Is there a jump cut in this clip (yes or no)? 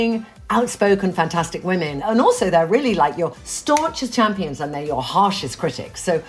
yes